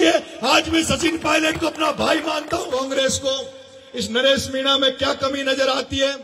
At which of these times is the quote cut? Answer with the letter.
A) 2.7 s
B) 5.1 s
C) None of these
A